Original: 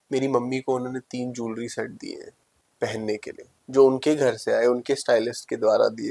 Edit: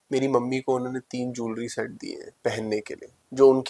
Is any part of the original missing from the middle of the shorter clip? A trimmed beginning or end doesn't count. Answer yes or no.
yes